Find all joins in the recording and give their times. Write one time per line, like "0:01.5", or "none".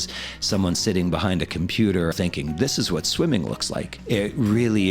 0:03.9